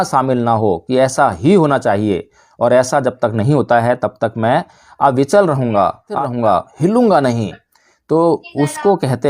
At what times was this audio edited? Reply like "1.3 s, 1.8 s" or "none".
6.2 s

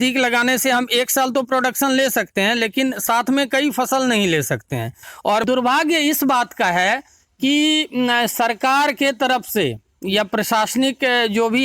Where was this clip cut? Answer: 5.4 s

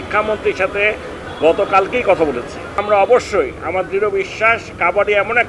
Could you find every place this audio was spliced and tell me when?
2.8 s

